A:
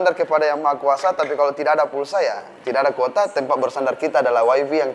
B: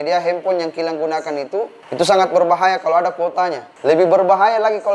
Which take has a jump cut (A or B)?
B